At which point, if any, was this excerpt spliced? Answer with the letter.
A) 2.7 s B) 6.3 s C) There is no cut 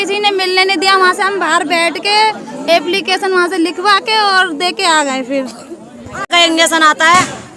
B